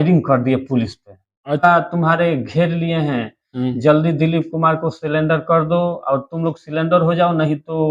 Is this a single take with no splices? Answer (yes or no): no